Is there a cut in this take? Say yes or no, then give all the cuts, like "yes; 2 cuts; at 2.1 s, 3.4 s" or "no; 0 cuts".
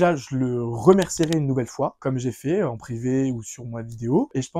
no; 0 cuts